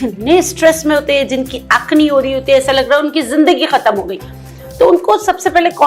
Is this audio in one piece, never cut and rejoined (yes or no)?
yes